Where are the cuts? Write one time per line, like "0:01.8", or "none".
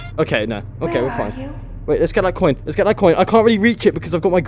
none